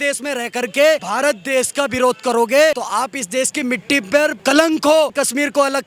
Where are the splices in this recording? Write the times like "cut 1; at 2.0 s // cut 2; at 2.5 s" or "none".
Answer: cut 1; at 1.1 s // cut 2; at 2.8 s // cut 3; at 4.4 s // cut 4; at 5.1 s